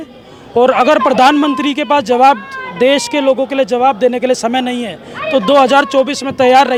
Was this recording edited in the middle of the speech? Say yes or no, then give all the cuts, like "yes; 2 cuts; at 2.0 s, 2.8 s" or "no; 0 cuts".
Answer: no; 0 cuts